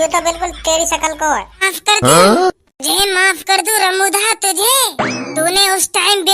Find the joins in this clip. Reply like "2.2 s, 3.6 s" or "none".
1.7 s